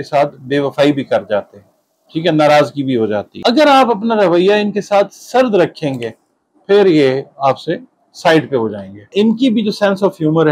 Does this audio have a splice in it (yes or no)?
yes